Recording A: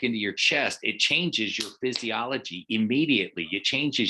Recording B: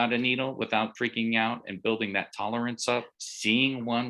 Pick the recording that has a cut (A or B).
B